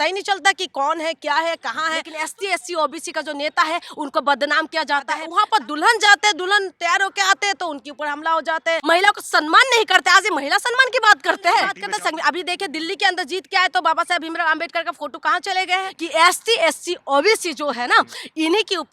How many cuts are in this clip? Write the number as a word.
five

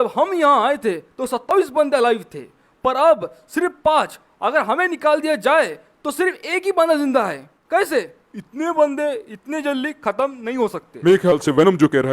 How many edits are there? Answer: one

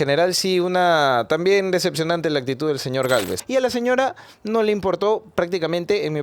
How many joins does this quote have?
one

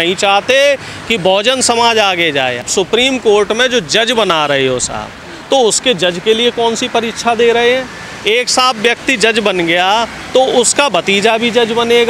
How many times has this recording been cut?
one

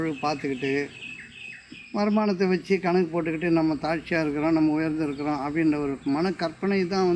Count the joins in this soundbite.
zero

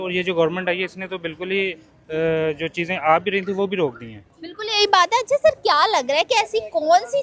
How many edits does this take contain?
zero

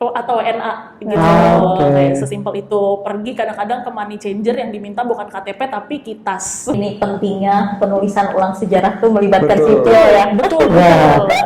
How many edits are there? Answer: one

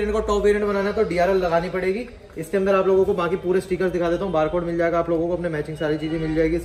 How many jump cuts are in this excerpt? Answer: zero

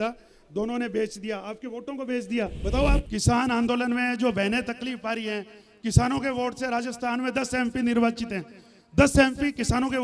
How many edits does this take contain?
one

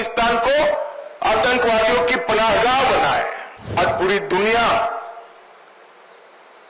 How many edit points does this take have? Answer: one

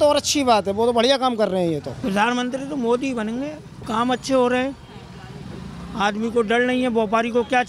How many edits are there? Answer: two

